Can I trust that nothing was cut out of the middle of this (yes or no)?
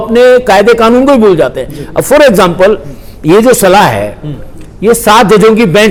yes